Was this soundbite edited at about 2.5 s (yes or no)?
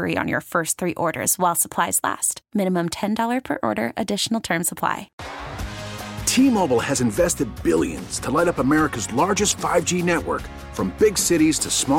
no